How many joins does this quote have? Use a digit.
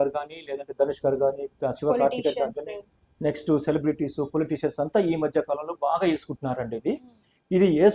0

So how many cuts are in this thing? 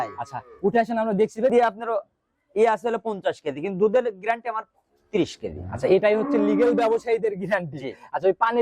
1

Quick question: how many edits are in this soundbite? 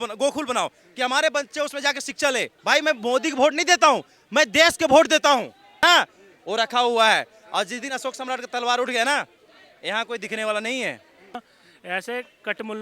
3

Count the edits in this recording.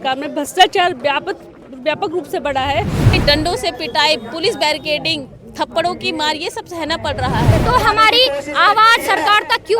2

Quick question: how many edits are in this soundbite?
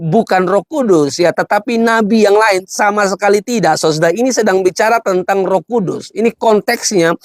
0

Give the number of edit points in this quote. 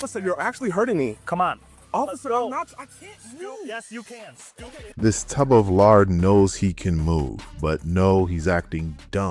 1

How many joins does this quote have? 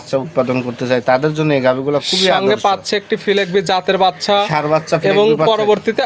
0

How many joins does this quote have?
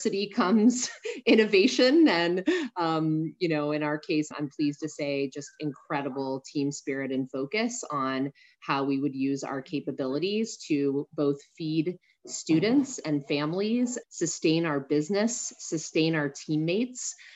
2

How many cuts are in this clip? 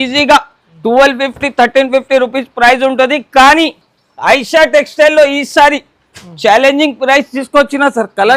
0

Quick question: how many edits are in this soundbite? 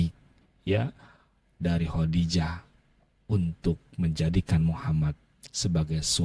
0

